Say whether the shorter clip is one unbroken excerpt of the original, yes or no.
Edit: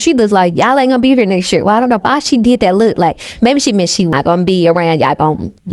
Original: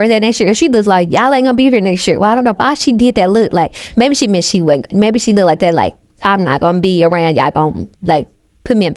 no